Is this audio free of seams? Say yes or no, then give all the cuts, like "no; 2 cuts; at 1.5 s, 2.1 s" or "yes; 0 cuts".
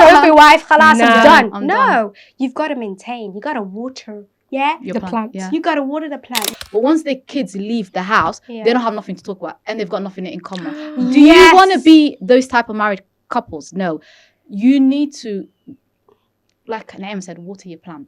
no; 1 cut; at 6.4 s